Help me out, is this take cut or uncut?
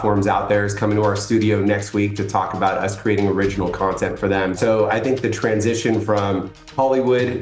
cut